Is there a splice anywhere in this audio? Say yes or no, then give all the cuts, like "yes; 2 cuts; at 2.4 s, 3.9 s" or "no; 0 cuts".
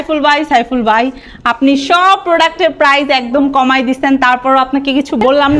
no; 0 cuts